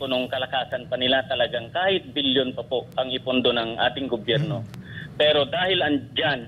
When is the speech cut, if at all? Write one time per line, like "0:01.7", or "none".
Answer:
none